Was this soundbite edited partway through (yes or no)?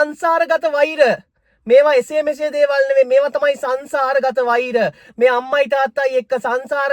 no